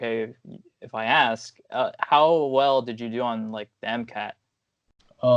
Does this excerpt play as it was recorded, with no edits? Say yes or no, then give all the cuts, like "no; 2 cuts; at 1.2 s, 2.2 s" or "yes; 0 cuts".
yes; 0 cuts